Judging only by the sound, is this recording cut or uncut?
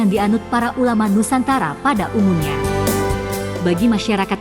uncut